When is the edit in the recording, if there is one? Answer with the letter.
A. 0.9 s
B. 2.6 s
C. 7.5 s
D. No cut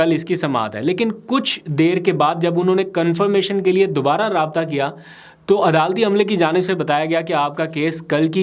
D